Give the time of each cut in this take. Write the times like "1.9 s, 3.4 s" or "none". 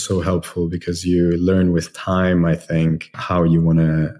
3.2 s